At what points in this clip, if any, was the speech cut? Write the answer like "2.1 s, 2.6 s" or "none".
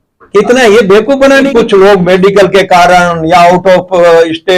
1.5 s

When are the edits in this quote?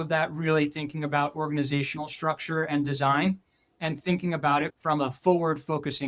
4.8 s

